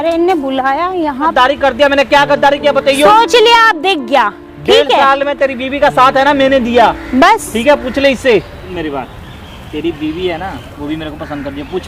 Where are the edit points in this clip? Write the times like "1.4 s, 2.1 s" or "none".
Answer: 1.4 s, 8.7 s